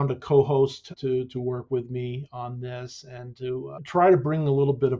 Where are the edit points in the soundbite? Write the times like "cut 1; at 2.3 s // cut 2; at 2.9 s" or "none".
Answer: cut 1; at 0.9 s // cut 2; at 3.8 s